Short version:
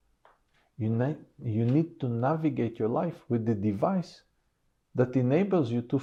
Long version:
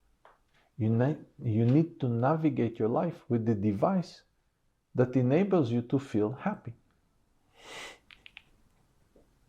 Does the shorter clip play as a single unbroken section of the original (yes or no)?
yes